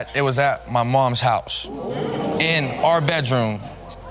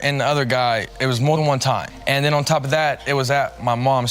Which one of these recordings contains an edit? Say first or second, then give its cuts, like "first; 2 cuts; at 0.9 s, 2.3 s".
second; 1 cut; at 1.9 s